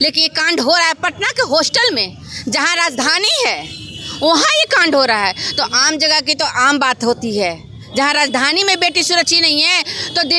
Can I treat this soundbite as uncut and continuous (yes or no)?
yes